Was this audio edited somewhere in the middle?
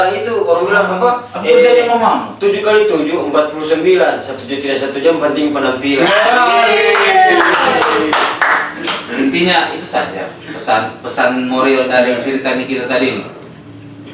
no; 0 cuts

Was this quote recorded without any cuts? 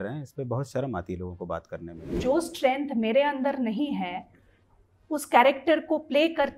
no; 1 cut; at 2.2 s

